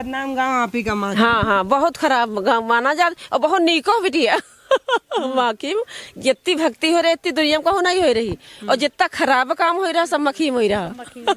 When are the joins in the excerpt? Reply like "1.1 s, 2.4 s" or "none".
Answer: none